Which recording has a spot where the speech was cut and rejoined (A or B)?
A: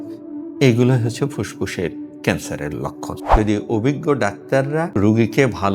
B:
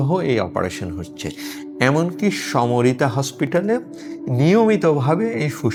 A